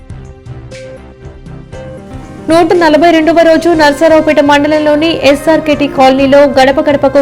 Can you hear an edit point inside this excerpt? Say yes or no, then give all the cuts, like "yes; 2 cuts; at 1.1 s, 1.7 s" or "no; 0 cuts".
yes; 1 cut; at 1.0 s